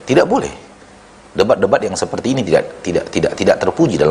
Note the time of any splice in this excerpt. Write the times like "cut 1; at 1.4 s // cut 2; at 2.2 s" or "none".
none